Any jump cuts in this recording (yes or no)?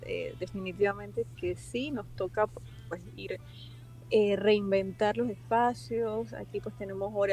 no